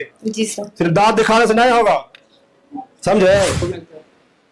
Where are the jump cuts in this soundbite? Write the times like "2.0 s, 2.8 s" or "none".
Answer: 3.6 s